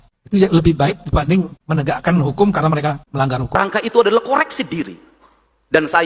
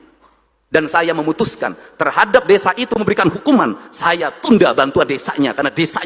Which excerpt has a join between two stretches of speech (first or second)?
first